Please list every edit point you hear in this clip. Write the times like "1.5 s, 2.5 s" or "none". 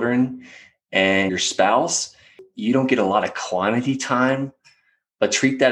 1.3 s, 2.4 s